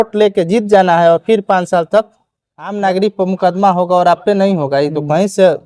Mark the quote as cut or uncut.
cut